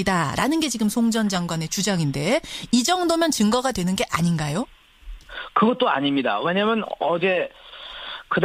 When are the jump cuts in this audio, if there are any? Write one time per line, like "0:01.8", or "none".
none